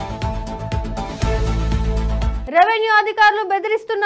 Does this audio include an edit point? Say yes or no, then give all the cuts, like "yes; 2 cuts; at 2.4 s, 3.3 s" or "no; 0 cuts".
yes; 1 cut; at 2.4 s